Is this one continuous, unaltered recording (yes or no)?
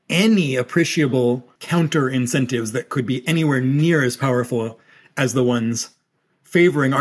no